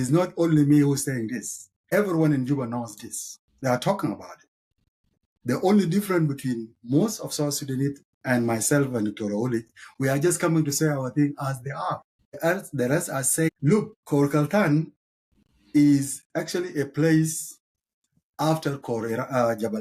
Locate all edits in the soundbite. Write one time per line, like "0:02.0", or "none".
0:13.5